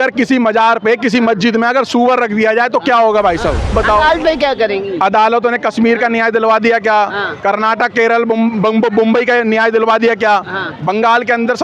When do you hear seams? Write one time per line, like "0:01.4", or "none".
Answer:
0:03.7